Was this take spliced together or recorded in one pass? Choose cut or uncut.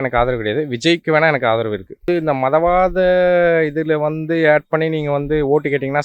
cut